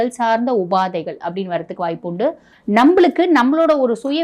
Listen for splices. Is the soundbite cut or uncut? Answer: cut